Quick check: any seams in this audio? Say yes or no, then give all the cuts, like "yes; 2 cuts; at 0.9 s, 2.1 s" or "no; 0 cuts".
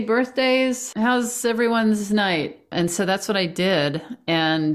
yes; 2 cuts; at 0.8 s, 2.7 s